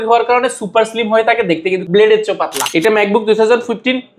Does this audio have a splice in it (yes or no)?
yes